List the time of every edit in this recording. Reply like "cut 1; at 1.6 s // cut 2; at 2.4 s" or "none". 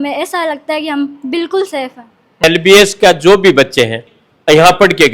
cut 1; at 2.4 s // cut 2; at 4.0 s